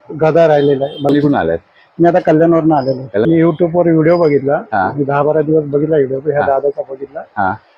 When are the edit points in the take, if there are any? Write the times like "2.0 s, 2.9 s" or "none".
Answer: 1.1 s, 3.2 s